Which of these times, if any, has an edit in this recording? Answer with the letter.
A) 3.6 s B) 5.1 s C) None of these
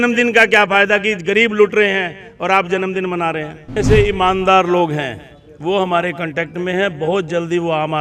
A